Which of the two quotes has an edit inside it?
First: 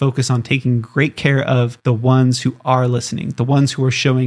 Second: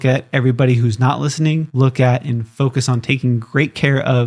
second; 1 cut; at 1.7 s

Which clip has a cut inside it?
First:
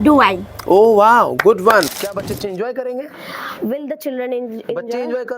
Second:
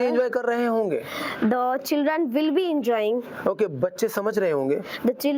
first; 1 cut; at 1.9 s

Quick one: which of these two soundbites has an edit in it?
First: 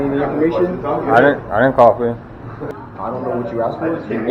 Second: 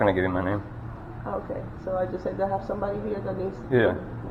first; 1 cut; at 2.7 s

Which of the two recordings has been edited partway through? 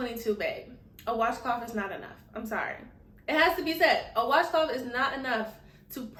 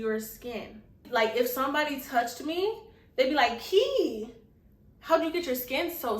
second; 1 cut; at 1.0 s

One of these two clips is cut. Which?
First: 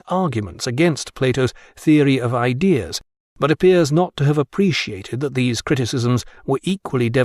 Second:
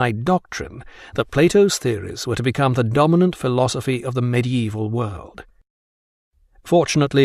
first; 1 cut; at 3.8 s

